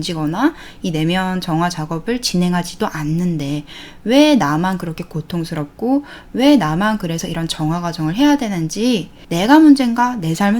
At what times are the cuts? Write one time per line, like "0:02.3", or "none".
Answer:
0:09.2

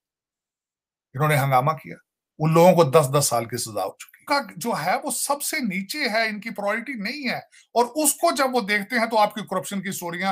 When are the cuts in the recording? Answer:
0:04.1

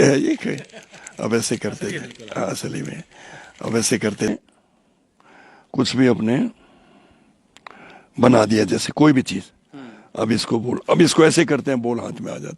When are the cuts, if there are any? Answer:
0:04.3

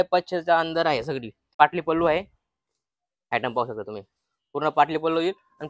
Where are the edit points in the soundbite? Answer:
0:01.5

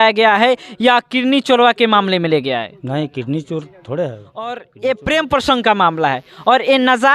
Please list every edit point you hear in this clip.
0:04.7

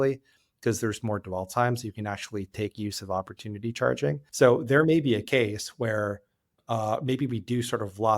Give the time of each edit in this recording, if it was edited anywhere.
0:04.2
0:06.6

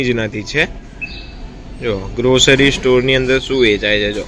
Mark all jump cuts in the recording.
none

